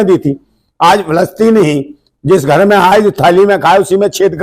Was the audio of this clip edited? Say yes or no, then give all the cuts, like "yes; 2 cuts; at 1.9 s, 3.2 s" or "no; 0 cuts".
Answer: no; 0 cuts